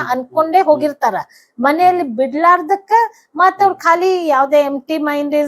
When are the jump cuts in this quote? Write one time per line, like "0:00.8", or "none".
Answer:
none